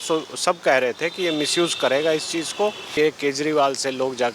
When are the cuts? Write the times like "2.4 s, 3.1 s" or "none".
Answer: 2.9 s